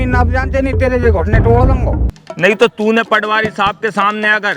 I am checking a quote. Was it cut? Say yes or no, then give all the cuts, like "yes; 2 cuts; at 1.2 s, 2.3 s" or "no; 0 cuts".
yes; 1 cut; at 2.0 s